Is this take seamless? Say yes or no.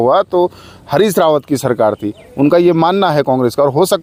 yes